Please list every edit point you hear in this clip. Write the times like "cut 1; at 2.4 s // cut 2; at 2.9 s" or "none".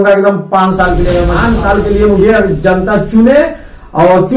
cut 1; at 1.4 s